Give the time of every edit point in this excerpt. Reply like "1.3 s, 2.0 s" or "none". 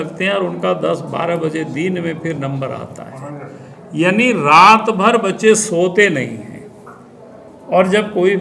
none